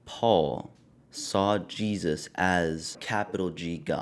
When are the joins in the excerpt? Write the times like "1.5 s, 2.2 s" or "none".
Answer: 3.0 s